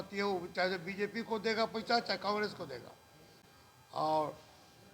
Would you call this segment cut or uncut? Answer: uncut